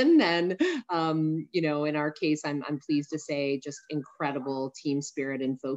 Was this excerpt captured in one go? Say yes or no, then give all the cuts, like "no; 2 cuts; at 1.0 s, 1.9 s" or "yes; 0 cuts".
yes; 0 cuts